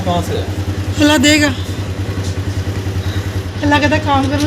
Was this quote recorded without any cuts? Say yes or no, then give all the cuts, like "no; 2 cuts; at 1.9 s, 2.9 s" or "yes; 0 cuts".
no; 1 cut; at 3.5 s